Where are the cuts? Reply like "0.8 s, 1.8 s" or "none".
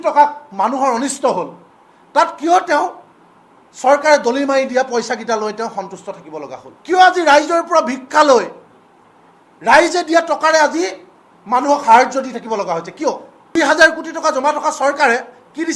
6.7 s, 13.6 s